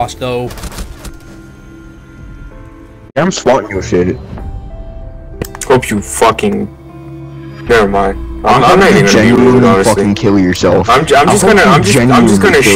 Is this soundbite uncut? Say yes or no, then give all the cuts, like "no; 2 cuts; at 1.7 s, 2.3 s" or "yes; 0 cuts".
yes; 0 cuts